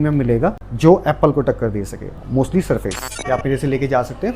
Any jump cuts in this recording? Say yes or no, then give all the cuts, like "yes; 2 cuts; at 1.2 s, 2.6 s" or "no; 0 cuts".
yes; 1 cut; at 3.1 s